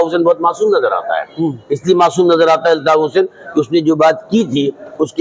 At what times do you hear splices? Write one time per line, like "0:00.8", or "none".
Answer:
none